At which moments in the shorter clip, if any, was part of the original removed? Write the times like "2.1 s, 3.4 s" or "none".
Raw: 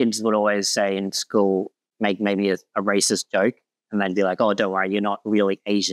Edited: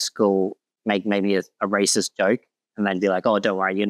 none